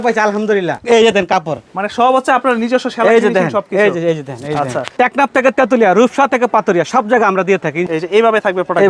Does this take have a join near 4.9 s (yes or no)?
yes